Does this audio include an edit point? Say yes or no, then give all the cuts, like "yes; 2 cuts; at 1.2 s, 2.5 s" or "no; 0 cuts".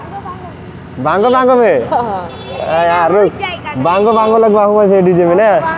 no; 0 cuts